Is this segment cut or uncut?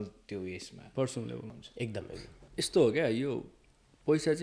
cut